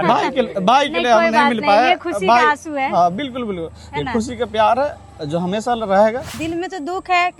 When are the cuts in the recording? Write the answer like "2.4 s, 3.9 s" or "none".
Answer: 6.3 s